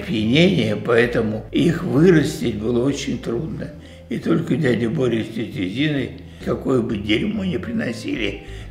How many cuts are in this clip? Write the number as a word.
zero